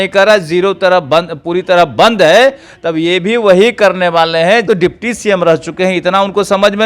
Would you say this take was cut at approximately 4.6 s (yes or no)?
yes